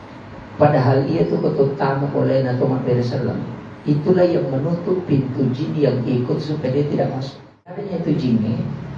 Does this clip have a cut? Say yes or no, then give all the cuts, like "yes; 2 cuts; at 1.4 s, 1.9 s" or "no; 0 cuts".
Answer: yes; 1 cut; at 7.9 s